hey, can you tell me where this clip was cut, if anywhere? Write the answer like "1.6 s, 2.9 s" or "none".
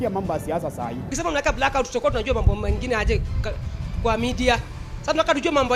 1.1 s